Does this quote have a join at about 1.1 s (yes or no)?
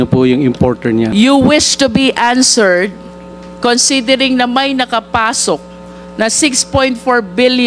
yes